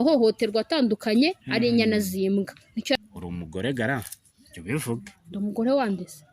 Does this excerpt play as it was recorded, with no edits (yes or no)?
no